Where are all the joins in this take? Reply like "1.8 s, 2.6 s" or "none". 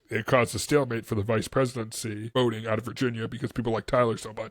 2.3 s